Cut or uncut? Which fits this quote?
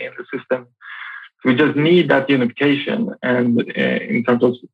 uncut